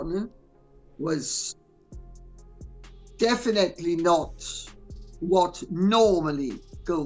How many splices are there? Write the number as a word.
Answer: two